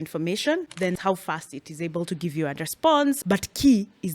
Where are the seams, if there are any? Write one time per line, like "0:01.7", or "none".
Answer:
0:00.9
0:03.2